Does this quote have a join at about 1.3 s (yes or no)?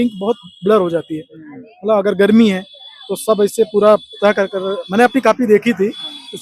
no